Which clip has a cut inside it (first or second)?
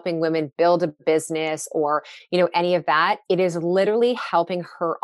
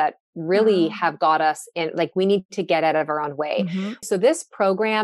second